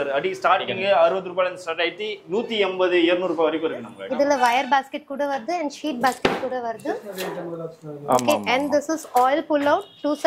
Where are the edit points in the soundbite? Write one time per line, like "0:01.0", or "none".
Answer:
0:03.9